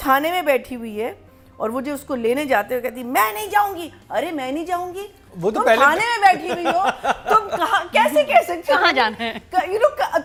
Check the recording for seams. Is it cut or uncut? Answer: uncut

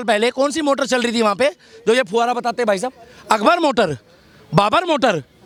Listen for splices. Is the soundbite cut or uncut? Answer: uncut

